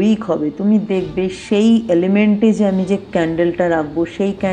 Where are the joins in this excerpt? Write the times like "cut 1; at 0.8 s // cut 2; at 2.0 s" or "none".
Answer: none

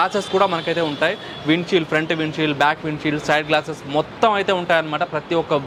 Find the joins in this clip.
none

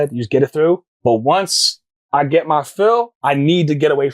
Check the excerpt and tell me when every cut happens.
cut 1; at 0.9 s

